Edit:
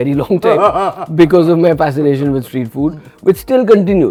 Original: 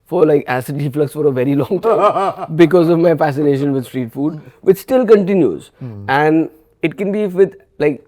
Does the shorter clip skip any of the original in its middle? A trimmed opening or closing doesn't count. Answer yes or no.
no